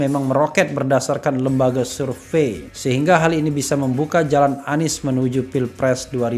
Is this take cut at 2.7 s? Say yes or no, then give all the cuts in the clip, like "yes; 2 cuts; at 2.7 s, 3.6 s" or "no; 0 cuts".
yes; 1 cut; at 2.7 s